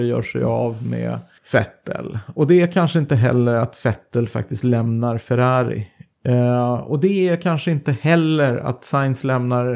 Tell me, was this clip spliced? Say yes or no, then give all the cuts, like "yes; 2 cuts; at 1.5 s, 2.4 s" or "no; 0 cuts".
yes; 1 cut; at 1.3 s